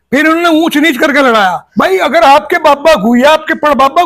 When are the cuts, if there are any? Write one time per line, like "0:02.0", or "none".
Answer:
0:01.6